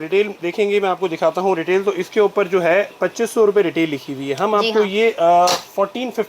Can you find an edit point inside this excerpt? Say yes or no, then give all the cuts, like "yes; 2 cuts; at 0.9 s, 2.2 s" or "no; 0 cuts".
no; 0 cuts